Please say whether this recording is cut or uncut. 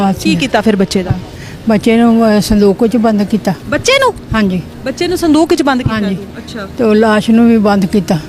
uncut